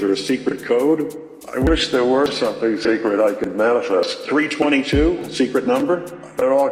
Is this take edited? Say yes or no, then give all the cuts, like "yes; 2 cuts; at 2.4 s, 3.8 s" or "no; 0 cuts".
no; 0 cuts